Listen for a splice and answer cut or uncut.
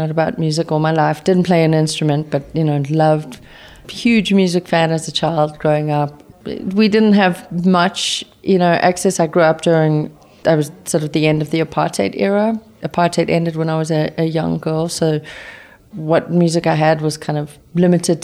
cut